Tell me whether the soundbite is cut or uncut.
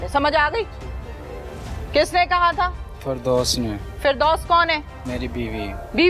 uncut